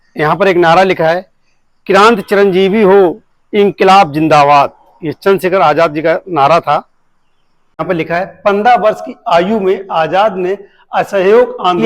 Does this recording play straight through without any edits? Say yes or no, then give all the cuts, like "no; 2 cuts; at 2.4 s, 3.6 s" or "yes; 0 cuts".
no; 1 cut; at 7.8 s